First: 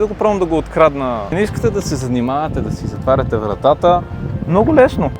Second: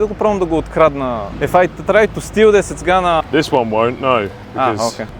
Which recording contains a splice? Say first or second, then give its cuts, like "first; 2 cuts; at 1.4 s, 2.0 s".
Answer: first; 1 cut; at 1.3 s